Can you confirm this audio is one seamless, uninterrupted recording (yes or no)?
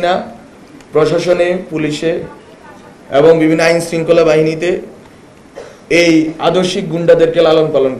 yes